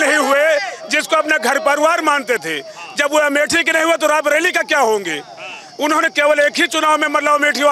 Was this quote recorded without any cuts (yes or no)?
yes